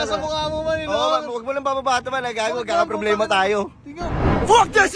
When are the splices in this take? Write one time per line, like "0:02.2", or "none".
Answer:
none